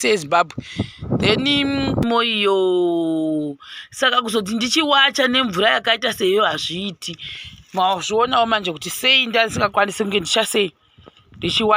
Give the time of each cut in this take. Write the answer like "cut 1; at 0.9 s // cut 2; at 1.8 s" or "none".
cut 1; at 2.0 s